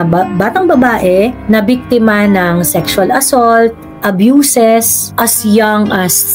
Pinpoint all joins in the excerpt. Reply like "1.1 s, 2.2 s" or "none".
1.4 s, 5.0 s